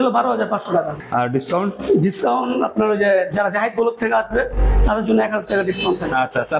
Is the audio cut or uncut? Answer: cut